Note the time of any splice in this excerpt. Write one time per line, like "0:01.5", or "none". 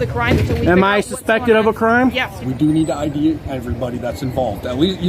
0:02.4